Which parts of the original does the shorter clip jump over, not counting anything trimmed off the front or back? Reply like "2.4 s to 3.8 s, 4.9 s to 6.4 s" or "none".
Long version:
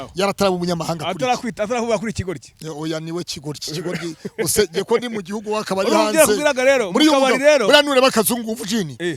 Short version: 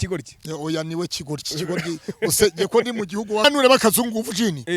5.6 s to 7.8 s